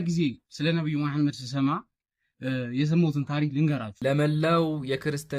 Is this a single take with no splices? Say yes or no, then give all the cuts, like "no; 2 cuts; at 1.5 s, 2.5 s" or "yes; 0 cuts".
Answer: no; 1 cut; at 3.9 s